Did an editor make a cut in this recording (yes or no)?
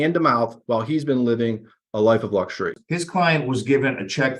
yes